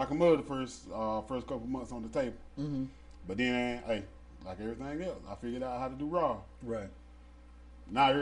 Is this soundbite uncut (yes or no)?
yes